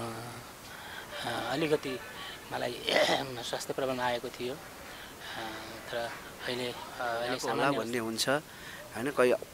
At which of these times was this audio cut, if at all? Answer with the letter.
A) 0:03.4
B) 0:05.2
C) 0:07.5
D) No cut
C